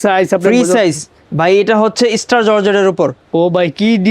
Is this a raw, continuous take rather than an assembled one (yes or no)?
no